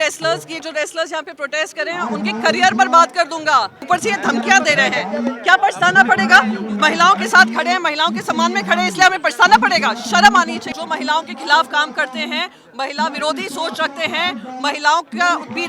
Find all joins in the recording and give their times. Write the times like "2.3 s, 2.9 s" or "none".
3.8 s, 10.7 s

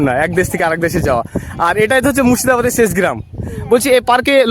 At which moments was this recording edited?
none

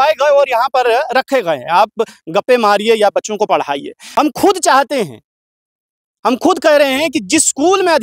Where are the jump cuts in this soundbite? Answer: 4.0 s

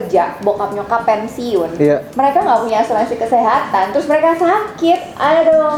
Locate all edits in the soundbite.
none

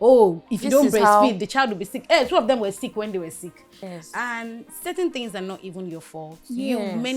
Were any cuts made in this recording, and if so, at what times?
3.9 s

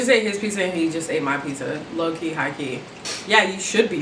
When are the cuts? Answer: 3.0 s

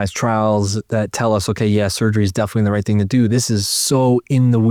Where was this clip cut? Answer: none

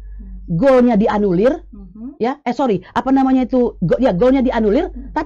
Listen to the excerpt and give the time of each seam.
none

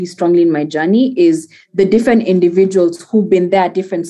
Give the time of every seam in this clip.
none

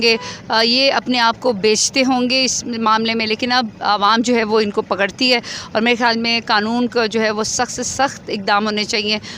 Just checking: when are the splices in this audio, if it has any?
none

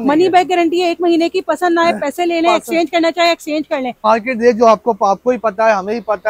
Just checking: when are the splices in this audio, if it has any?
4.0 s

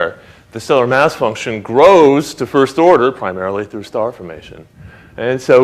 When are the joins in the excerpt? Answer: 2.0 s

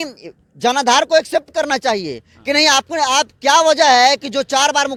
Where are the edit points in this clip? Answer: none

